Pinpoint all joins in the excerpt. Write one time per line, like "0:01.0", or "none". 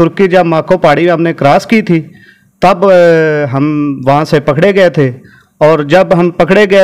none